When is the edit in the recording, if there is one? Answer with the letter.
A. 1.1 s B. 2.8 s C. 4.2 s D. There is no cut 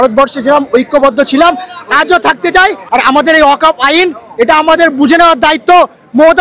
B